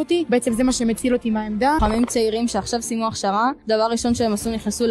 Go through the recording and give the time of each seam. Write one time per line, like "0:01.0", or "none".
0:01.8